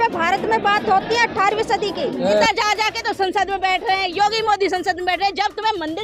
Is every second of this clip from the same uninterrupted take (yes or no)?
no